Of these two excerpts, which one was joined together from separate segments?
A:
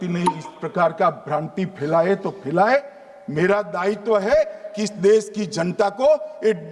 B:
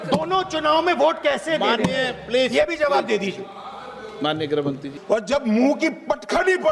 B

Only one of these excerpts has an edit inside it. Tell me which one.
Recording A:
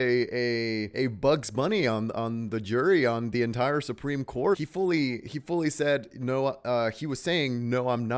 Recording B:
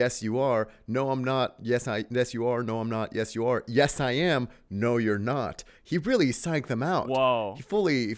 A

